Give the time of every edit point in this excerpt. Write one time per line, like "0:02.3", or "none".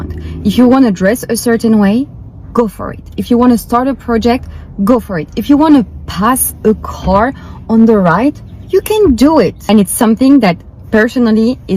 none